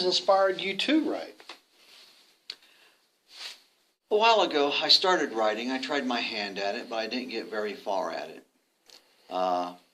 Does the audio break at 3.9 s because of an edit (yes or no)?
yes